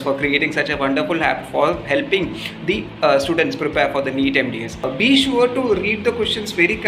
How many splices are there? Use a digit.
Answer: 1